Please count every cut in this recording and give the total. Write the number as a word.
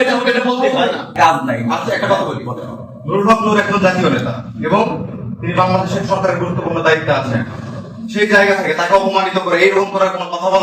one